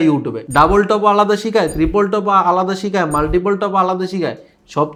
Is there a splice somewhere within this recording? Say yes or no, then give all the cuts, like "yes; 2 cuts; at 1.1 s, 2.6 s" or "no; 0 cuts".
no; 0 cuts